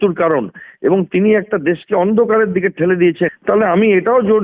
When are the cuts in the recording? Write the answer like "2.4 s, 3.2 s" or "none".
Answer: 3.3 s

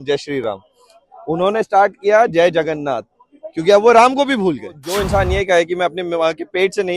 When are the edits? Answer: 4.8 s

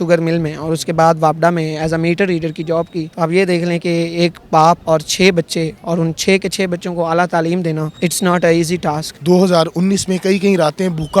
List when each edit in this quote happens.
3.0 s, 4.8 s, 7.9 s, 9.1 s

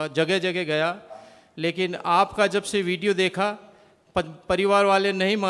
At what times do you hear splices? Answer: none

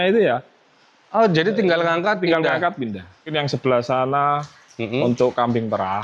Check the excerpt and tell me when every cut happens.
3.3 s

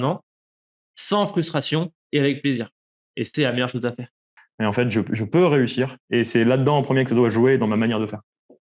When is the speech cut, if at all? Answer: 4.3 s

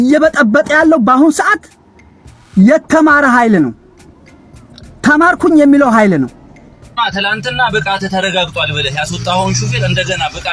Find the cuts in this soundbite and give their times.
6.9 s

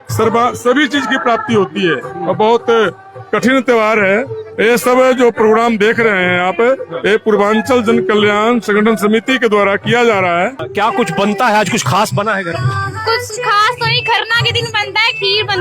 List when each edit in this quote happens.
10.6 s

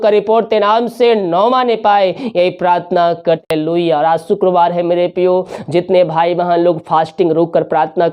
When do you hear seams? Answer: 3.4 s

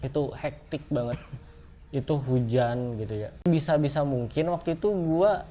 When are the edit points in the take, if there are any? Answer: 3.5 s

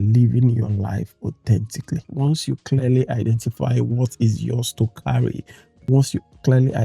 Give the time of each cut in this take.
2.0 s

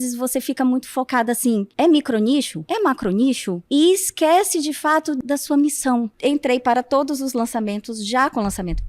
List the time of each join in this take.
1.7 s, 2.6 s, 3.5 s, 5.2 s, 6.1 s

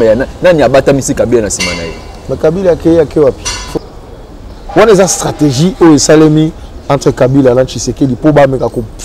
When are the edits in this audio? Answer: 3.7 s

